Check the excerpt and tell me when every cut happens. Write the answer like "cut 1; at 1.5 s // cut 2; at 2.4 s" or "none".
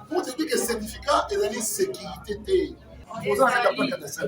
cut 1; at 3.1 s